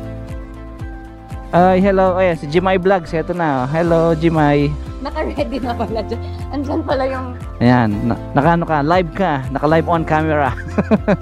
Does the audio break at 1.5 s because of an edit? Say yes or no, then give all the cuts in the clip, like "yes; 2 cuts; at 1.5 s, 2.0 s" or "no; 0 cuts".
yes; 1 cut; at 1.5 s